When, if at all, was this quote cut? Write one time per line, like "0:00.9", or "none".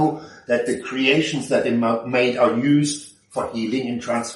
none